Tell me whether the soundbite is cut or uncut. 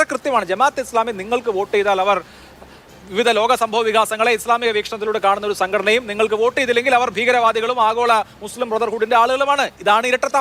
uncut